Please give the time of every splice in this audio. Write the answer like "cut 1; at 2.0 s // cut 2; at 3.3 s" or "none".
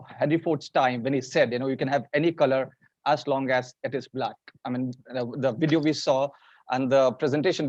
none